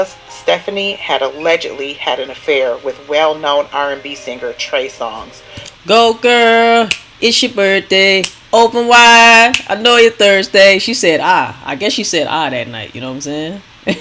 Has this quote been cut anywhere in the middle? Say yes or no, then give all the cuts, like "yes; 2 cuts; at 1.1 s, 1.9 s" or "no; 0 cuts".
no; 0 cuts